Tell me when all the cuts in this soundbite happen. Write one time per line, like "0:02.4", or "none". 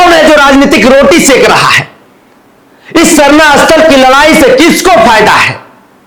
none